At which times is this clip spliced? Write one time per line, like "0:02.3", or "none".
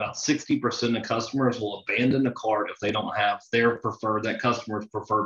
none